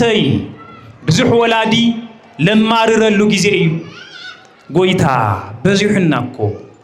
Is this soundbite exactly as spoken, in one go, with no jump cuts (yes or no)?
yes